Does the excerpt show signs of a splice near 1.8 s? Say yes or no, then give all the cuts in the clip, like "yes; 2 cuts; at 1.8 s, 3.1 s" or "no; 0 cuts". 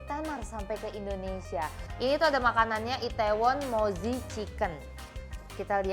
yes; 1 cut; at 1.8 s